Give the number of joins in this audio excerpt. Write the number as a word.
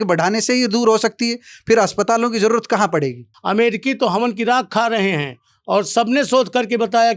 one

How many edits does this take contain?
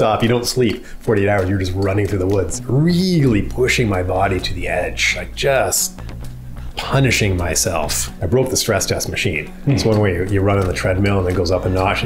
two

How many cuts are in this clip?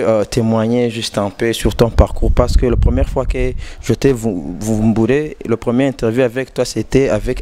zero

